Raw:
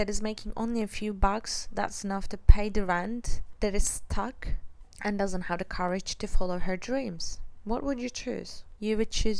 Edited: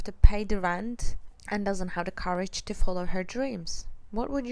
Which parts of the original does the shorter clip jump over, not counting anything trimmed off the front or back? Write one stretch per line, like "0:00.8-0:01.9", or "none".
0:03.4-0:04.7

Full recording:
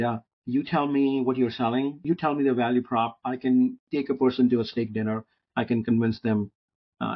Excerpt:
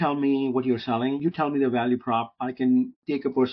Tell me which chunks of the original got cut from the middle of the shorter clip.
0:01.9-0:02.0

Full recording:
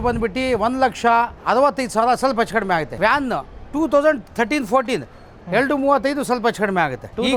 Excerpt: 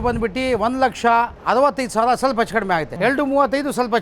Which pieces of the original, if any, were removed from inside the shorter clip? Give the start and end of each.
0:02.9-0:05.4

